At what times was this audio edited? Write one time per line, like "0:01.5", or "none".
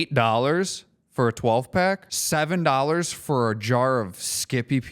0:02.1